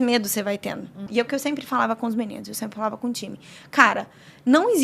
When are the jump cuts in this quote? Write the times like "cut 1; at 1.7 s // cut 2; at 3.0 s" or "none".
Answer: cut 1; at 1.1 s